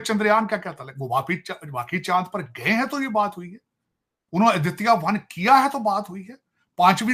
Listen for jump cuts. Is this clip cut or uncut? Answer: uncut